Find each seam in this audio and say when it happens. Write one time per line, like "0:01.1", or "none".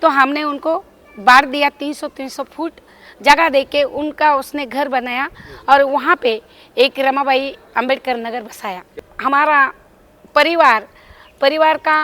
0:08.8